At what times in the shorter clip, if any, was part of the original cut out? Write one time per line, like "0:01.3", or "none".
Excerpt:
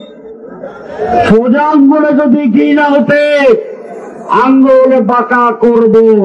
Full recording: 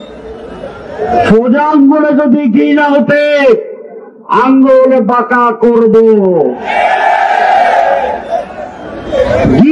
none